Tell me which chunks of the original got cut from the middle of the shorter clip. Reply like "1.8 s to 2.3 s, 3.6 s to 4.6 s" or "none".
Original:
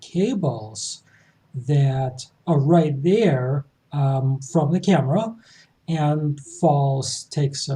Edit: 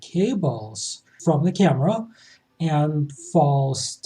1.1 s to 4.4 s